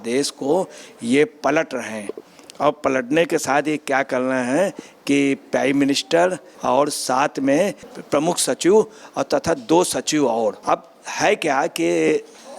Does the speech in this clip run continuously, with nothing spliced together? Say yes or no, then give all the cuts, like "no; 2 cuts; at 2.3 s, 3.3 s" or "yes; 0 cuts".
yes; 0 cuts